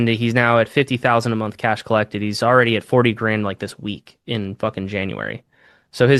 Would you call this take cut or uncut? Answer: uncut